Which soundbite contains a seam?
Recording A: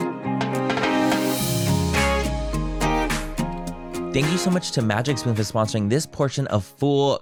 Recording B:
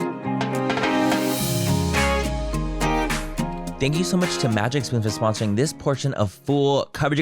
B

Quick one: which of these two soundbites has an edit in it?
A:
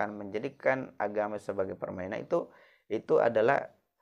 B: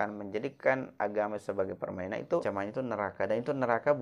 B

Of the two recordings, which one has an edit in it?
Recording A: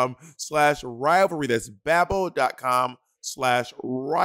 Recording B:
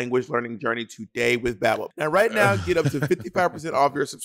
B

